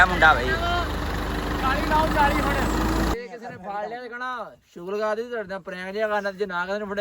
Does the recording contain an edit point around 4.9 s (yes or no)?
no